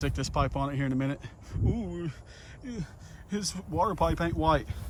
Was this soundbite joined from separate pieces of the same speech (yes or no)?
no